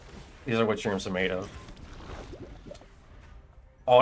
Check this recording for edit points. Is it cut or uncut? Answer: uncut